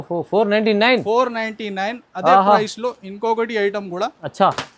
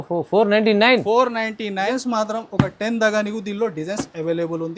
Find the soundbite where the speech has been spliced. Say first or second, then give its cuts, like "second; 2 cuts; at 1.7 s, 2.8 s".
second; 1 cut; at 1.9 s